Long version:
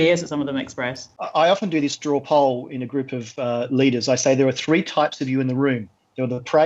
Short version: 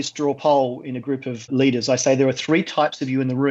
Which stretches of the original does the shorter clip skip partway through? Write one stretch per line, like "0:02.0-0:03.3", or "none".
0:03.3-0:03.6